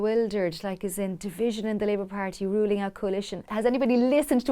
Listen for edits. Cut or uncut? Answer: cut